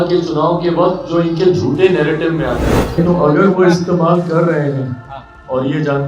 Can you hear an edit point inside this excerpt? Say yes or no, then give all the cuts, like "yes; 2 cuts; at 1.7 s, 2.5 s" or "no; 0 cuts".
yes; 1 cut; at 3.0 s